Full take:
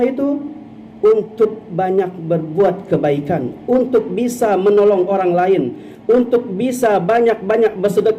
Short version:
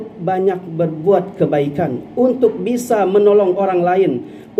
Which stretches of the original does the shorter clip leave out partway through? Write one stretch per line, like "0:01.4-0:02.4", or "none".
none